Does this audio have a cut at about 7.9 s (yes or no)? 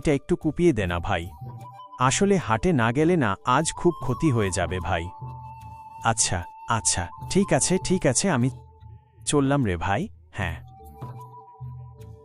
no